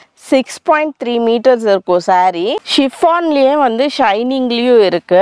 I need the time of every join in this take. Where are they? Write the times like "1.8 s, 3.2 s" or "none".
2.6 s